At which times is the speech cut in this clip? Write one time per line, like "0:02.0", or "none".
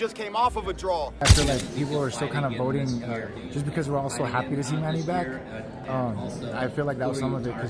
0:01.2